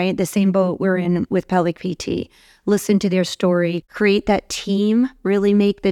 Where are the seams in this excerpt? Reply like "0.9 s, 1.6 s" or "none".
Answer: 3.8 s